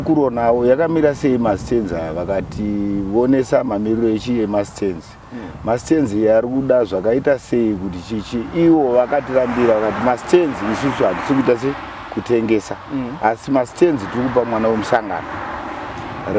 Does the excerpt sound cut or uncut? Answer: uncut